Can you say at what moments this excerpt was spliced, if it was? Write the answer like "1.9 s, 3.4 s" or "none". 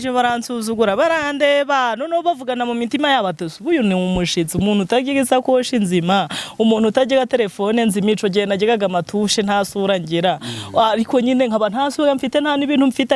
none